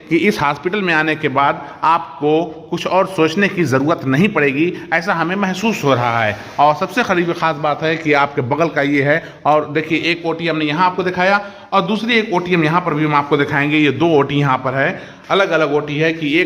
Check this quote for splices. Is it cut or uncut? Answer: uncut